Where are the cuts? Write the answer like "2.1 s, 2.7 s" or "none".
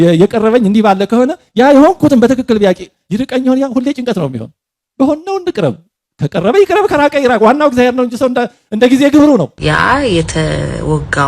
9.6 s

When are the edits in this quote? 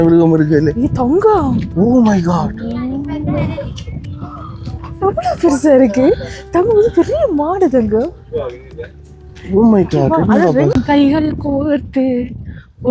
10.8 s

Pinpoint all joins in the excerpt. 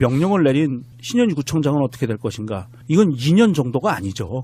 3.3 s

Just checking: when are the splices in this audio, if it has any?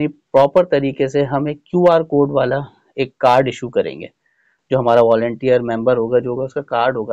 none

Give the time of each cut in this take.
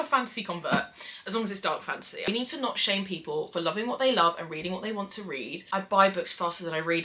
2.3 s, 5.6 s

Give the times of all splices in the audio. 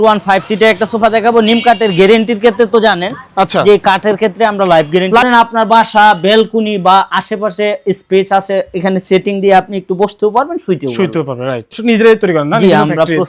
5.2 s, 11.8 s

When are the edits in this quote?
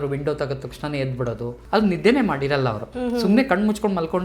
1.6 s

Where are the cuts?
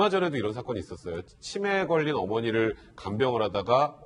none

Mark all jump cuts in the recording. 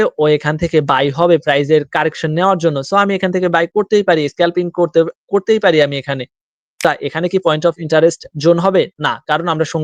6.5 s

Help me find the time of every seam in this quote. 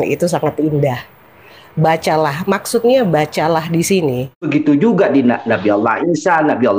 4.3 s

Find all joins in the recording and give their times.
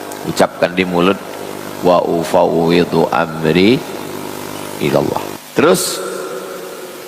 5.4 s

